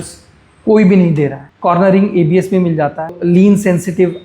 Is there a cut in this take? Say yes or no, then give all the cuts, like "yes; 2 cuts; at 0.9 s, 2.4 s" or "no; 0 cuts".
yes; 2 cuts; at 1.5 s, 3.2 s